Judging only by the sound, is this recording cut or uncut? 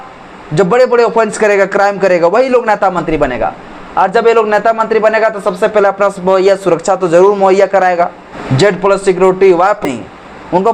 cut